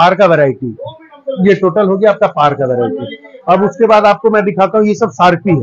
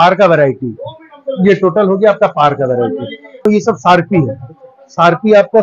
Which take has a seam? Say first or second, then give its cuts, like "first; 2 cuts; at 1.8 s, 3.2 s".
second; 1 cut; at 3.4 s